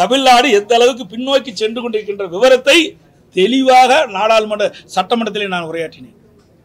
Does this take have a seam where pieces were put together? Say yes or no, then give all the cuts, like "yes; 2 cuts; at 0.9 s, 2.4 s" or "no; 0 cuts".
no; 0 cuts